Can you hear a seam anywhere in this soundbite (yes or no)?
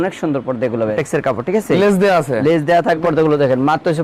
yes